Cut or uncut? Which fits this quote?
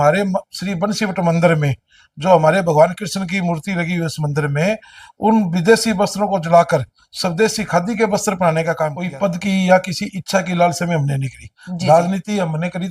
cut